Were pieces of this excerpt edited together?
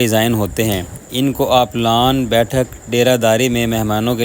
no; 0 cuts

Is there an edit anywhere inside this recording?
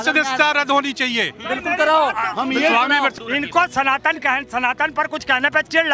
yes; 1 cut; at 3.1 s

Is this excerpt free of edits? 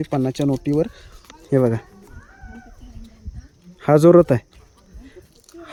yes; 0 cuts

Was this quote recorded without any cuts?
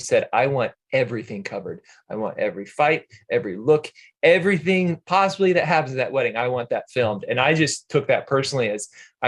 yes; 0 cuts

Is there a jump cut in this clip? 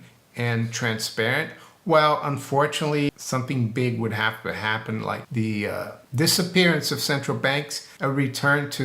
yes; 4 cuts; at 3.1 s, 5.2 s, 6.0 s, 7.8 s

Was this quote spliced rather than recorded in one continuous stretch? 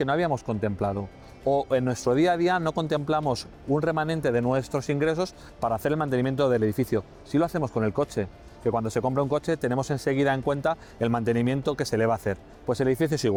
no; 0 cuts

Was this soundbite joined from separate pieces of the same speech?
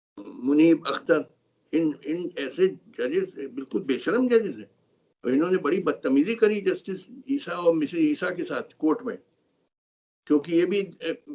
no; 0 cuts

